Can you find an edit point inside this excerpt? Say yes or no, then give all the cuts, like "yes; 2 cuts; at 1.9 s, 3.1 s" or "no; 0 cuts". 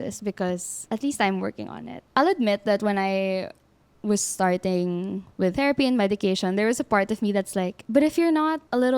yes; 1 cut; at 2.1 s